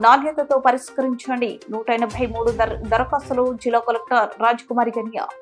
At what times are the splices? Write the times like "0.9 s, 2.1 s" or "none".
none